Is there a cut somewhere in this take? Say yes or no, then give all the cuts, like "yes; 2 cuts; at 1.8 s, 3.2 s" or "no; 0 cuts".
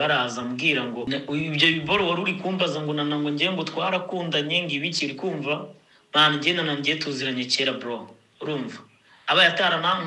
yes; 1 cut; at 1.1 s